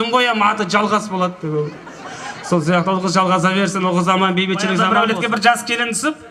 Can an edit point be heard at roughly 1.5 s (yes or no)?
no